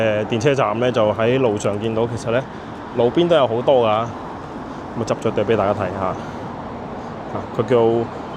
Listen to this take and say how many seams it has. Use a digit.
0